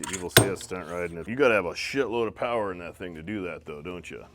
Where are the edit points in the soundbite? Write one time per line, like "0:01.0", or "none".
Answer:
0:01.2